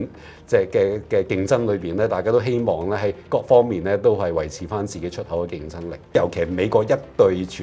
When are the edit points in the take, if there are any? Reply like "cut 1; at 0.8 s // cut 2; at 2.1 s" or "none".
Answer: cut 1; at 6.1 s